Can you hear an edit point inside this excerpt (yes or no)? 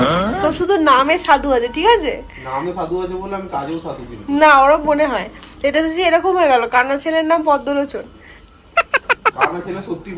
yes